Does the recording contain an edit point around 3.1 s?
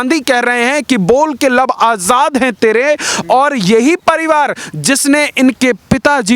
no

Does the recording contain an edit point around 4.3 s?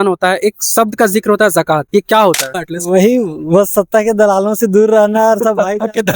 no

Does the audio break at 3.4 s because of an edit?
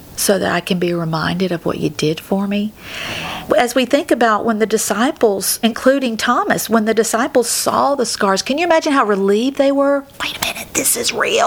yes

